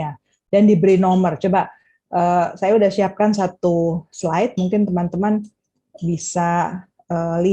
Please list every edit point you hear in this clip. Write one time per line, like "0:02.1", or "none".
none